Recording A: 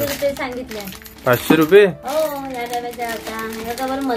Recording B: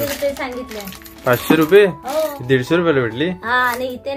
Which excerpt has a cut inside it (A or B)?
B